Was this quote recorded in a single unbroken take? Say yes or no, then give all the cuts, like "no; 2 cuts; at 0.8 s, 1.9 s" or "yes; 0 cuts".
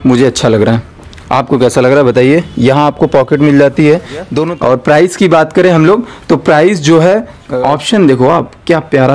no; 2 cuts; at 4.4 s, 7.4 s